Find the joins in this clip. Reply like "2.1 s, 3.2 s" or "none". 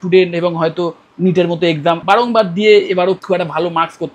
2.0 s, 3.2 s